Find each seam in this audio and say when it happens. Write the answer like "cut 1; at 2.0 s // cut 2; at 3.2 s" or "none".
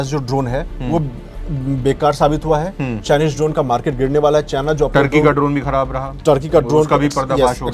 none